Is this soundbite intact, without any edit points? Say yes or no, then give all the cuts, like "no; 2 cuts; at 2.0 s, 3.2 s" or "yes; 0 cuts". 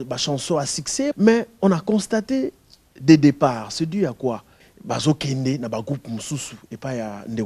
no; 2 cuts; at 1.1 s, 4.7 s